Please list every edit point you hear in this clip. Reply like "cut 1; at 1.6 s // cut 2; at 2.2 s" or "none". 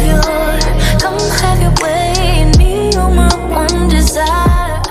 none